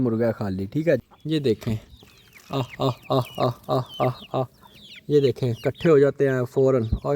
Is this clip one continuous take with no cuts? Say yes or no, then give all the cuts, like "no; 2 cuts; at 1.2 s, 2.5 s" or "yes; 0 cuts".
no; 1 cut; at 1.1 s